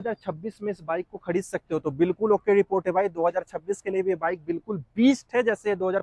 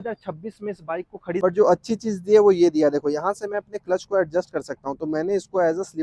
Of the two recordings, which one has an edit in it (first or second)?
second